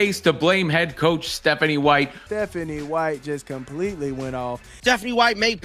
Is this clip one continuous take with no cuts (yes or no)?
no